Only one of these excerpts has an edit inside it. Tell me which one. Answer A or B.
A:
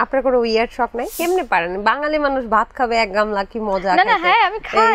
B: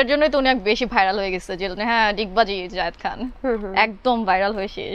A